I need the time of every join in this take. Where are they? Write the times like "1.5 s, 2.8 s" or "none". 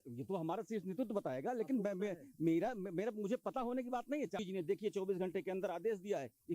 4.4 s